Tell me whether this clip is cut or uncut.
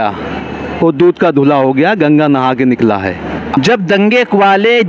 cut